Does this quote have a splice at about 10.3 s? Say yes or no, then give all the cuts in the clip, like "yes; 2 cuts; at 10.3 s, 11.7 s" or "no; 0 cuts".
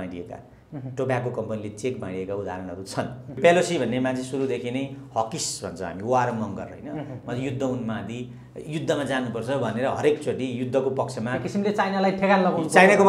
no; 1 cut; at 3.3 s